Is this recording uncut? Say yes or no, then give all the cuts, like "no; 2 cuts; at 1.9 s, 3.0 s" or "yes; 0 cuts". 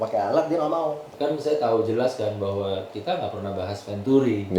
no; 1 cut; at 1.1 s